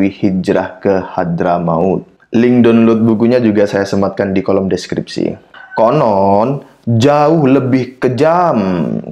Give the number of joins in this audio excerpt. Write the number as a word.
two